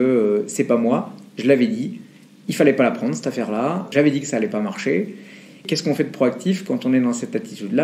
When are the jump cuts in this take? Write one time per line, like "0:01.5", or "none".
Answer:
none